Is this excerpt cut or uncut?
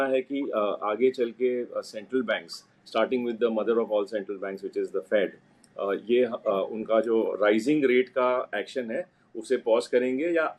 uncut